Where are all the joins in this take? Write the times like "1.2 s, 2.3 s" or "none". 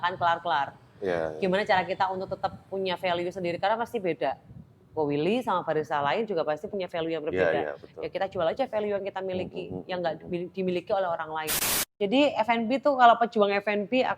11.9 s